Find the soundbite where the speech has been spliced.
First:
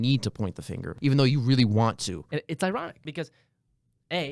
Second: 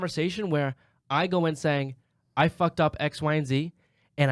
first; 3 cuts; at 0.9 s, 2.2 s, 3.0 s

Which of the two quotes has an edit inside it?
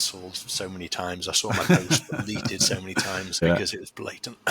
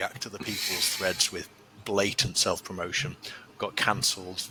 first; 1 cut; at 3.4 s

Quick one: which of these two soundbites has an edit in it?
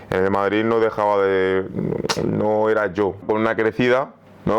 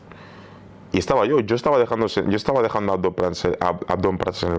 first; 1 cut; at 3.2 s

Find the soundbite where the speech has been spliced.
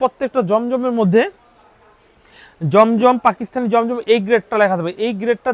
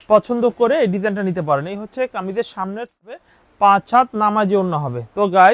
second; 1 cut; at 3.0 s

